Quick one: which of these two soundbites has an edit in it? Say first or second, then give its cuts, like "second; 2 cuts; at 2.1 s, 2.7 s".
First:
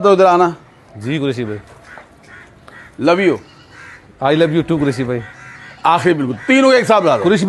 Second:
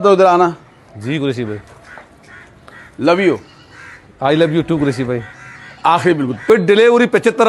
second; 1 cut; at 6.5 s